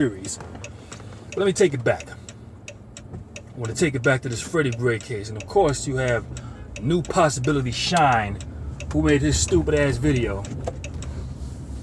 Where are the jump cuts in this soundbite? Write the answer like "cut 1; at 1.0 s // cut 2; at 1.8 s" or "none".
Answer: none